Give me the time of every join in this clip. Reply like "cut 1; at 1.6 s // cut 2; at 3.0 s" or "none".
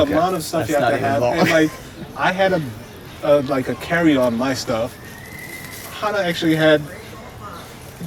none